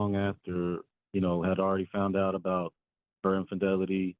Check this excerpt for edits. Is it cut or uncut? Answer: cut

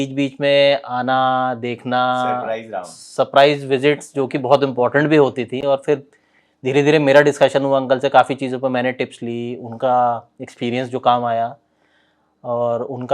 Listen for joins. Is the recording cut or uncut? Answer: uncut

